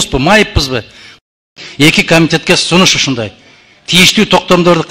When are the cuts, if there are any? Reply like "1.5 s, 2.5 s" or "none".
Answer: 1.3 s